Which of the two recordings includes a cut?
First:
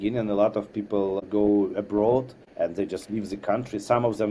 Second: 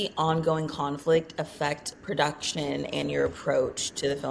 first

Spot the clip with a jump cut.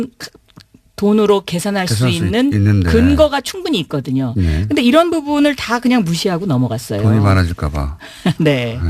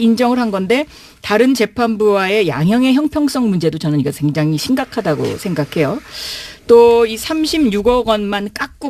first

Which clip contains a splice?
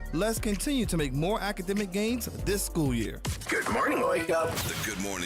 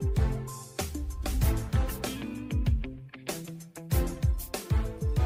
first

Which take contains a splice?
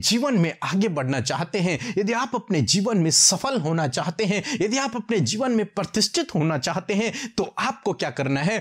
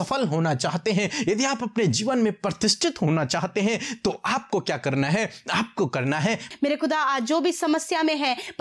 second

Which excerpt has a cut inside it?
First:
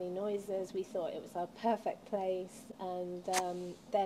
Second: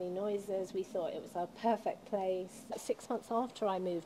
second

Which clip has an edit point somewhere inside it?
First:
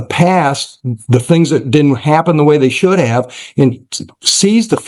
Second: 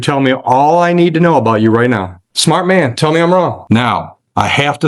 second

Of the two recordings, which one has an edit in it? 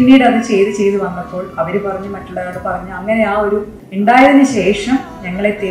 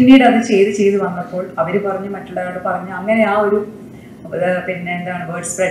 first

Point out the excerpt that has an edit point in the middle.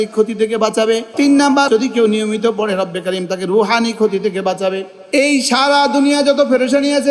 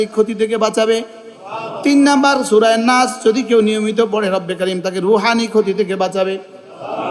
first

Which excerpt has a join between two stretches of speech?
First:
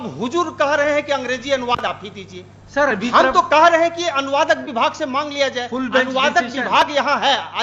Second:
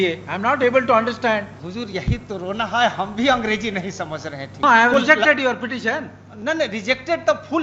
second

